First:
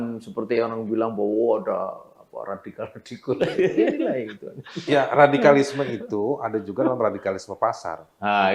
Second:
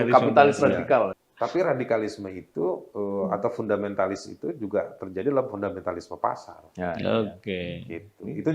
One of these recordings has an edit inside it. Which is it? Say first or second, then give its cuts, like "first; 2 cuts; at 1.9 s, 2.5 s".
second; 1 cut; at 1.1 s